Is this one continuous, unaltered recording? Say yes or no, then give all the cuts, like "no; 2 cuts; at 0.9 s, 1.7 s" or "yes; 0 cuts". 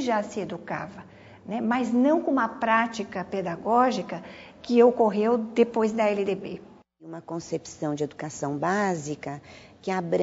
no; 1 cut; at 7.2 s